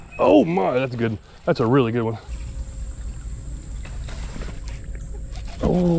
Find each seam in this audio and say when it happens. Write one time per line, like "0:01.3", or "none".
0:02.3